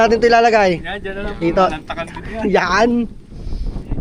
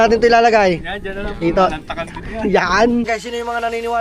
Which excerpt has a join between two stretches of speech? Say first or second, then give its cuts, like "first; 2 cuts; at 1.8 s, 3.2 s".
second; 1 cut; at 3.1 s